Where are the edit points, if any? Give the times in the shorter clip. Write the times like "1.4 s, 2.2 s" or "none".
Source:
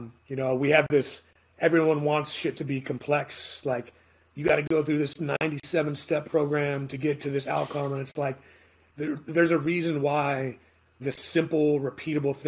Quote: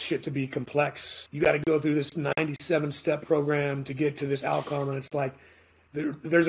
1.1 s